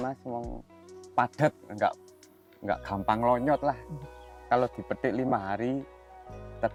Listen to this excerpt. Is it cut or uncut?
uncut